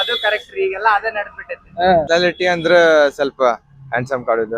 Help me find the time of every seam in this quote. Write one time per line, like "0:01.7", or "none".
0:02.1